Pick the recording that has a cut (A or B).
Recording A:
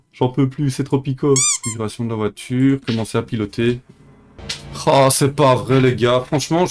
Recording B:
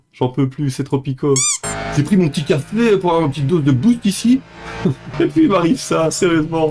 B